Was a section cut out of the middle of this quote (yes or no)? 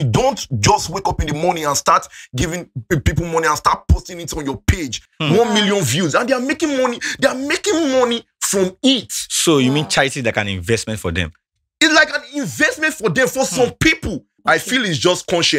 yes